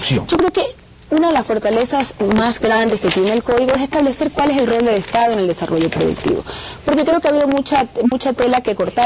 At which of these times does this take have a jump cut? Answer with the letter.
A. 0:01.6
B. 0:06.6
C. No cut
A